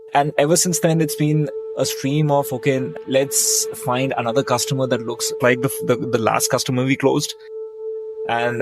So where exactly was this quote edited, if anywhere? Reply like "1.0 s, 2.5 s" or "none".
1.5 s